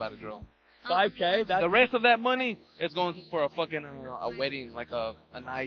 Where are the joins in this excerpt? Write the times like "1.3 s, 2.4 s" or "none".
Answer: none